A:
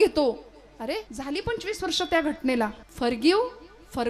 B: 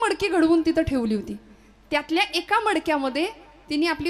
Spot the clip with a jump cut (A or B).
A